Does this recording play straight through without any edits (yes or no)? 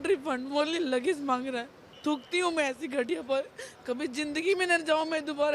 no